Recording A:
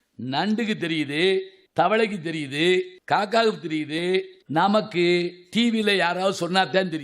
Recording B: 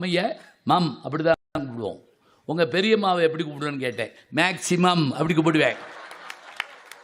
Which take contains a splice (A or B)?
A